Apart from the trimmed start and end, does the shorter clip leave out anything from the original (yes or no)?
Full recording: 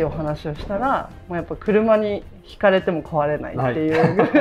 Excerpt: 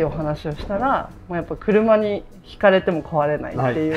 no